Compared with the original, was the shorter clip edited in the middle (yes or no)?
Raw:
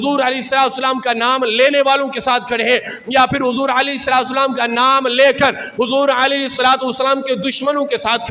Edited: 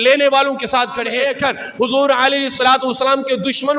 yes